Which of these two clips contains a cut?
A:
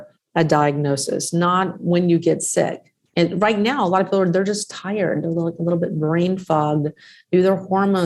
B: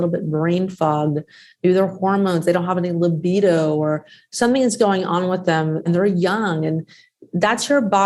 B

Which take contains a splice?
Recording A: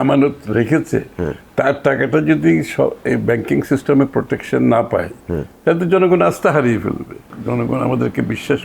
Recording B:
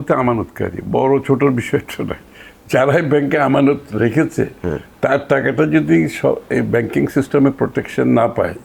A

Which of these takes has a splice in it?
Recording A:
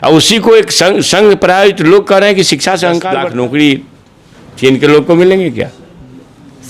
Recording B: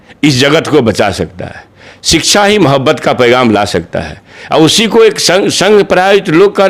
A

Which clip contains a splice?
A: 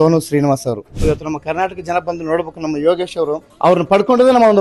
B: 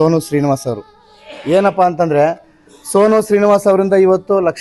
A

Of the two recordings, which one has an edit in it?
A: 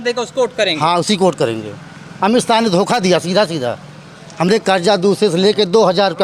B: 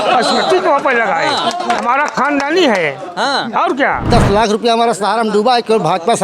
B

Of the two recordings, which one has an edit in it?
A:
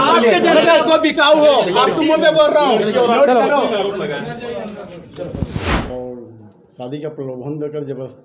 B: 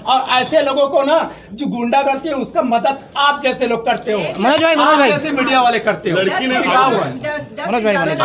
A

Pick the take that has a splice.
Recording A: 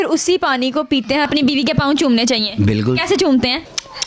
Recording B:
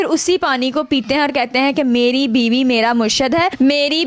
A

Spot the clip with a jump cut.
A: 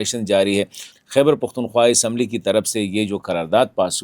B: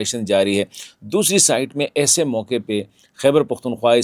A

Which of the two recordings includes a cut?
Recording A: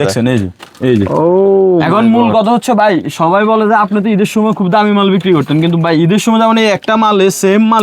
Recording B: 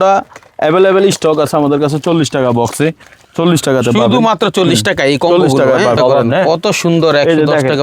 B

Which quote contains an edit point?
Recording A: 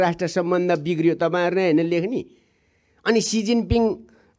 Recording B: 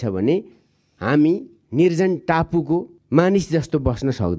B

